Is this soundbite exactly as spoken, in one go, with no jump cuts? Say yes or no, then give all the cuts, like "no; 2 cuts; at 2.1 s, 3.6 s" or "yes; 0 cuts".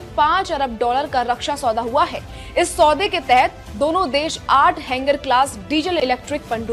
yes; 0 cuts